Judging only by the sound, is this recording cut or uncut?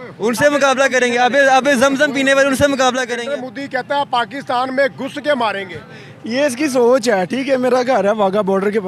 cut